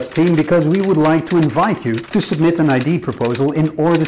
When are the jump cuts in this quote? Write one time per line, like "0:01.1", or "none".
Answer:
none